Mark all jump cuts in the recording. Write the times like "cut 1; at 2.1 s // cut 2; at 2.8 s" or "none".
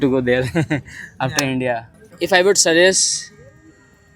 cut 1; at 1.9 s